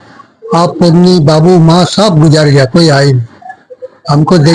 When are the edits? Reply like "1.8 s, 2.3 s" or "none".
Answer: none